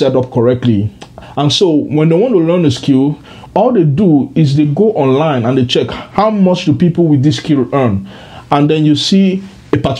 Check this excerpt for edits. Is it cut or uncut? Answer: uncut